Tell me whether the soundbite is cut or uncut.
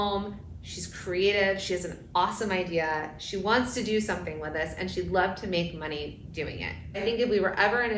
cut